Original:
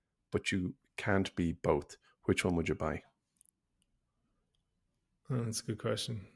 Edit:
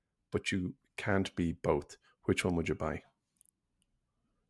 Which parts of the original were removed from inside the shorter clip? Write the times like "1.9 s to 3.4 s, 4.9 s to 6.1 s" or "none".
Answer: none